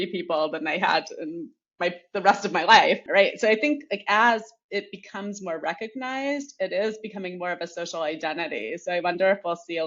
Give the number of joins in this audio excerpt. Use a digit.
0